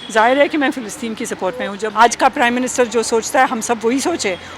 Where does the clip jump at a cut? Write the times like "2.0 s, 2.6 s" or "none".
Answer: 1.8 s